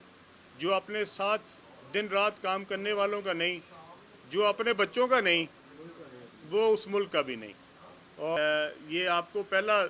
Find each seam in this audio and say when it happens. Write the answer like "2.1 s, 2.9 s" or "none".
8.4 s